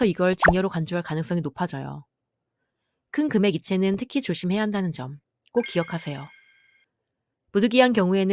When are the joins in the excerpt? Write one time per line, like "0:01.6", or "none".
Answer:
none